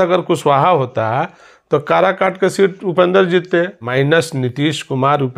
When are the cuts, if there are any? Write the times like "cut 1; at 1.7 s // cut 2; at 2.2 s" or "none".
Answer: cut 1; at 3.8 s